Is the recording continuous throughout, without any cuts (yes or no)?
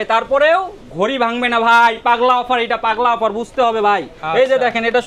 yes